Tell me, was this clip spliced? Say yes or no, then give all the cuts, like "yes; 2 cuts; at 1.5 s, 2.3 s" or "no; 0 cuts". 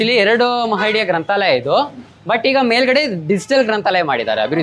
no; 0 cuts